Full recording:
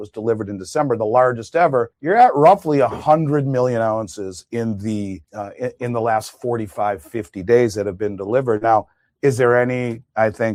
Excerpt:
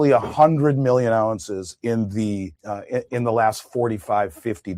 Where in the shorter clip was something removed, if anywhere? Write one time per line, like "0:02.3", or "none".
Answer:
none